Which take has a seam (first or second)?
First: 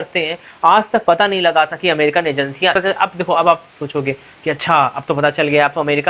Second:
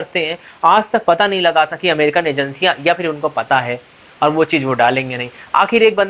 first